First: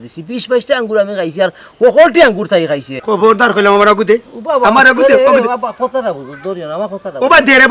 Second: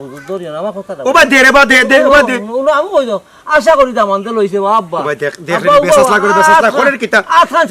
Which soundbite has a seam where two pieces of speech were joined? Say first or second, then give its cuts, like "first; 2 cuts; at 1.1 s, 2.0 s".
first; 1 cut; at 2.9 s